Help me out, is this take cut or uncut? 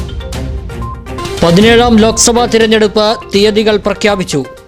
cut